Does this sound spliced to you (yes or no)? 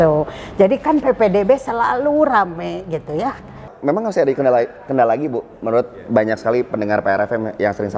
yes